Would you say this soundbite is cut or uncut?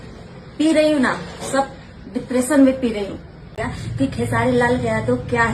cut